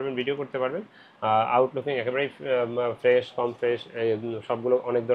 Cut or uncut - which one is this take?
uncut